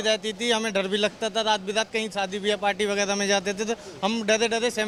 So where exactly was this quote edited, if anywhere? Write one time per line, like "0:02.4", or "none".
none

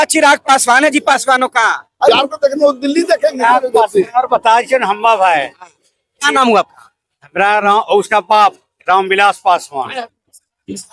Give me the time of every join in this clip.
0:02.1
0:03.4

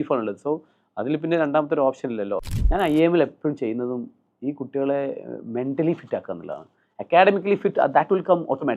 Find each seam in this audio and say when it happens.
0:02.5

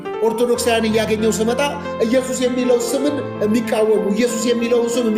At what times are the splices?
none

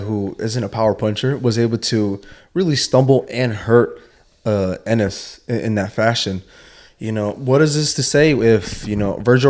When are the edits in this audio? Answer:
none

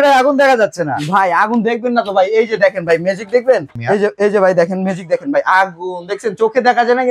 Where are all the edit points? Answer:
0:03.7

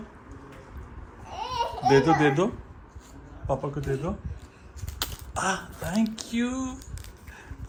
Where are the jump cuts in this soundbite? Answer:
none

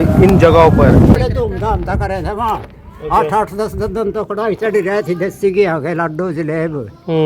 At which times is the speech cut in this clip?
0:01.1

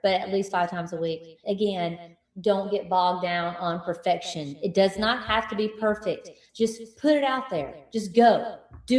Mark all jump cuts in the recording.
0:01.4
0:06.7

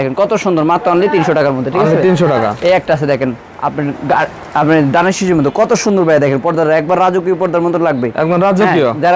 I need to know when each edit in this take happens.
none

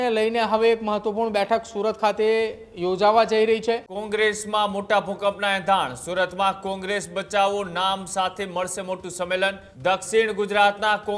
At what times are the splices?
0:03.9
0:09.7

